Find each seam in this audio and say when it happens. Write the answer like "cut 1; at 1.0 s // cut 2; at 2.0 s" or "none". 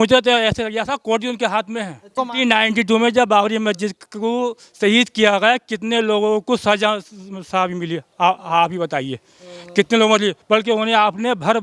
cut 1; at 2.1 s